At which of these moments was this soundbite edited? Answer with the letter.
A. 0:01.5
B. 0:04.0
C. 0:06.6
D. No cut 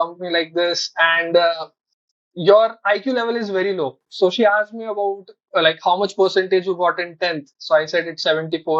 D